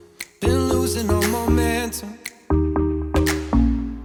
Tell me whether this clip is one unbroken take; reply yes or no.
yes